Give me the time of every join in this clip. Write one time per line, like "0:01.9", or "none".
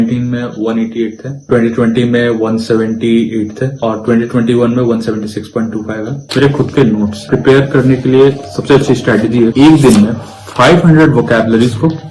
0:01.4
0:06.2
0:07.2
0:09.5